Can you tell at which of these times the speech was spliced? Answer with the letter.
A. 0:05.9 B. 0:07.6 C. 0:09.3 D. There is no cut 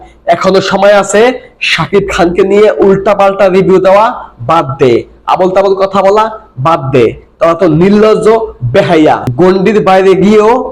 C